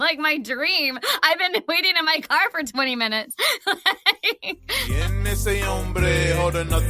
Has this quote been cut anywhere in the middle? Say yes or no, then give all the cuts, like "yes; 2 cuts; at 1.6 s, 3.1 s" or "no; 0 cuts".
yes; 1 cut; at 4.9 s